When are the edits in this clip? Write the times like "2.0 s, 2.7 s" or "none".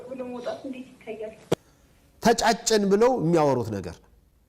1.5 s